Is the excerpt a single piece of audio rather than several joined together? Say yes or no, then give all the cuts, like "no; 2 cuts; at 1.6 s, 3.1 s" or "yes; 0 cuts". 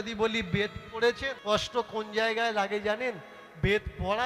no; 1 cut; at 1.3 s